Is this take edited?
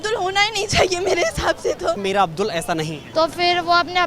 yes; 2 cuts; at 2.0 s, 3.0 s

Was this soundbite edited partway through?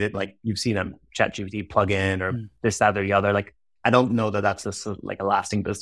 yes; 1 cut; at 3.6 s

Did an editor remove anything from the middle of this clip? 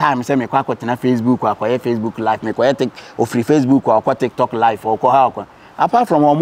no; 0 cuts

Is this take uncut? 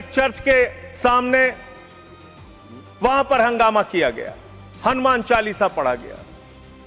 yes; 0 cuts

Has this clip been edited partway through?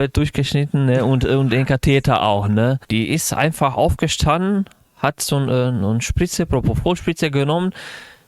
yes; 1 cut; at 2.8 s

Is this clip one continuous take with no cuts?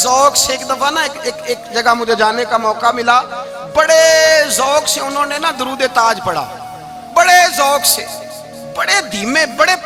yes; 0 cuts

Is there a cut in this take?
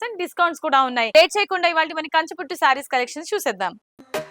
yes; 1 cut; at 1.1 s

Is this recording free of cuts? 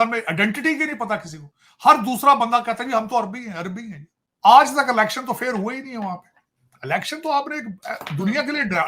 yes; 0 cuts

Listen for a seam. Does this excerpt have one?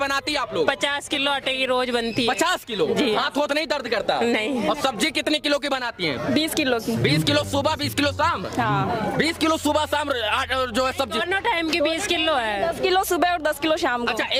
no; 0 cuts

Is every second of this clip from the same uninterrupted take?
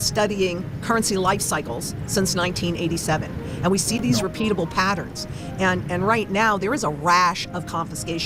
yes; 0 cuts

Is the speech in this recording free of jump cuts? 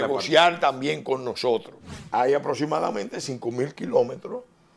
no; 1 cut; at 1.8 s

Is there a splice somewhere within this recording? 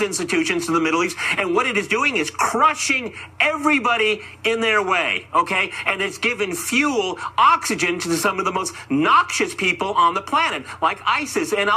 no; 0 cuts

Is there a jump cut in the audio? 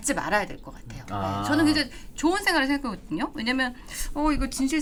no; 0 cuts

